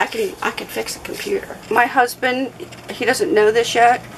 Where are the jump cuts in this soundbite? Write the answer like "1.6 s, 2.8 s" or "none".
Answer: 1.6 s